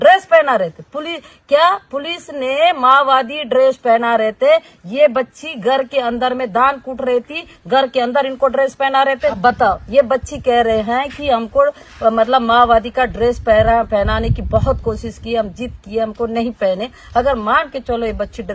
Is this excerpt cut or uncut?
cut